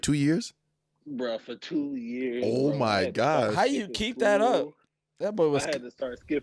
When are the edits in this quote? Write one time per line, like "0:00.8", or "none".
none